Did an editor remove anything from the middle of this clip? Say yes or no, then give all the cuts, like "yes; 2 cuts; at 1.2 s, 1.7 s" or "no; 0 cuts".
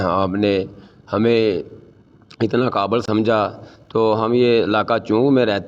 yes; 1 cut; at 3.0 s